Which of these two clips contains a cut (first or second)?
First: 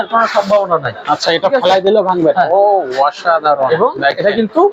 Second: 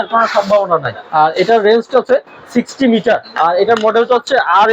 second